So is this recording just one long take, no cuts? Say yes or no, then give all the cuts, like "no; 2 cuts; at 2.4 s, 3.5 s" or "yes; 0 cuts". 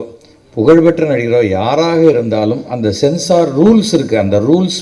yes; 0 cuts